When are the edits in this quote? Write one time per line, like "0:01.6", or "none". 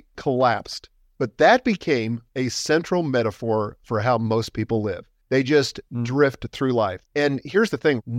0:02.2
0:05.1
0:07.0